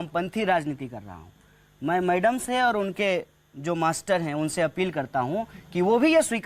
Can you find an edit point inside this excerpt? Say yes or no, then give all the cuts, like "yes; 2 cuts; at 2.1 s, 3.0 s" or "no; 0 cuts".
no; 0 cuts